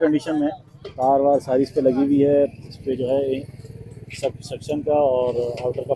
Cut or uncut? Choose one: uncut